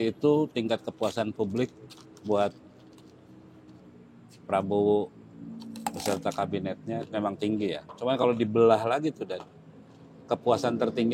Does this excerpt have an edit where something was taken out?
no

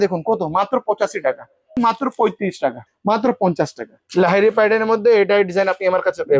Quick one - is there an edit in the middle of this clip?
yes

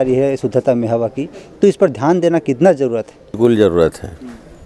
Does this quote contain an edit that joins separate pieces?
yes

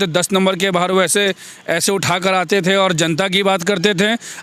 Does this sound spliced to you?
no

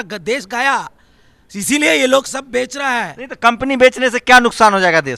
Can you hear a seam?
no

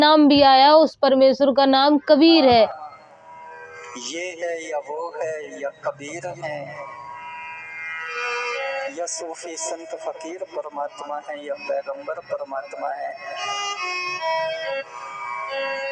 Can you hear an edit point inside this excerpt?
yes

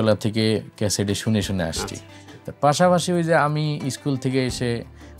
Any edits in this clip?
no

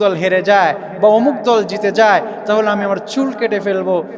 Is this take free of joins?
yes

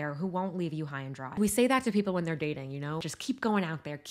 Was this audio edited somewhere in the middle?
yes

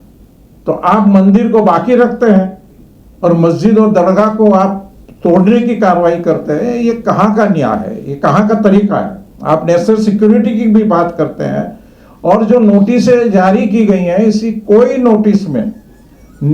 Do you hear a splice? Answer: no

